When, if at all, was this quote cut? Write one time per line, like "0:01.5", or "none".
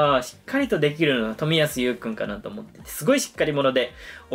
none